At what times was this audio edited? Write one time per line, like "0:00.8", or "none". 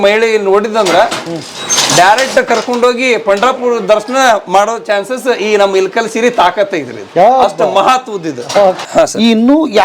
0:08.8

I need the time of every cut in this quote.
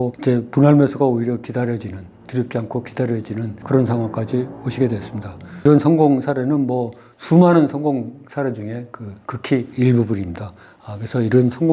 0:05.6

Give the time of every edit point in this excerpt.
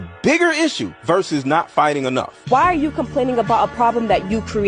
none

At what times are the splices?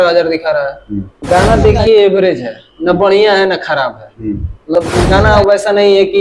0:01.1
0:04.7

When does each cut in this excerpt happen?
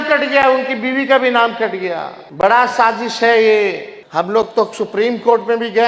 0:02.2
0:03.9

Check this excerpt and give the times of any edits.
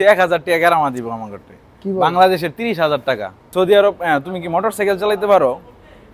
0:03.5

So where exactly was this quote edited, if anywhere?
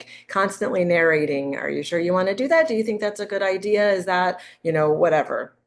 none

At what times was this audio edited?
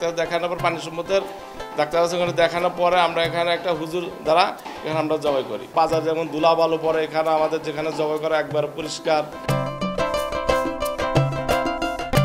0:09.4

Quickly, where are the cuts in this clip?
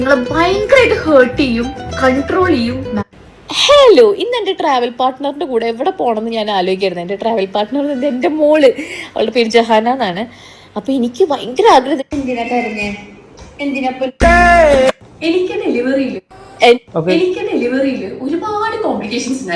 none

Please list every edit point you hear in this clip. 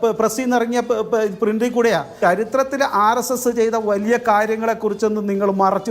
0:02.1

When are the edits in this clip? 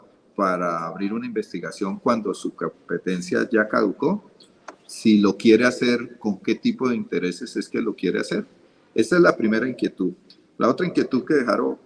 none

